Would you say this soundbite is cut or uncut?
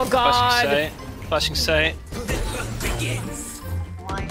uncut